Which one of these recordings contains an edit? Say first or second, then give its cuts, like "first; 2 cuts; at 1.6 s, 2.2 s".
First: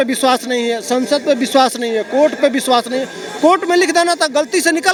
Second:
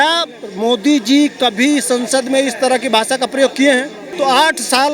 second; 1 cut; at 4.0 s